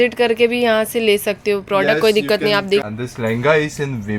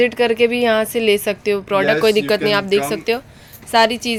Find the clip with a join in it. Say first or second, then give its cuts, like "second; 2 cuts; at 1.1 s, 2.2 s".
first; 1 cut; at 2.9 s